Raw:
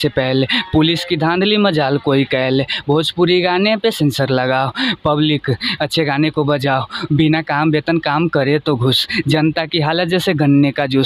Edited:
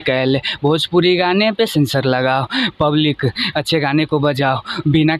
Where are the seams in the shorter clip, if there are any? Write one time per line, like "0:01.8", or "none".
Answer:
none